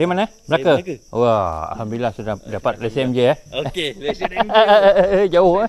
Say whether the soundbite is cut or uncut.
uncut